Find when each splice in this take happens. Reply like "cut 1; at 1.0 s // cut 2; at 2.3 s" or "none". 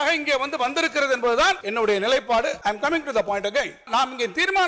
cut 1; at 1.6 s // cut 2; at 2.6 s // cut 3; at 3.9 s